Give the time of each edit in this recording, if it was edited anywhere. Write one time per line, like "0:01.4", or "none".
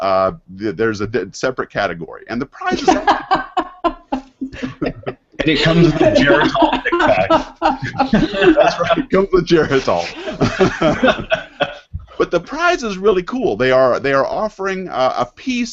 none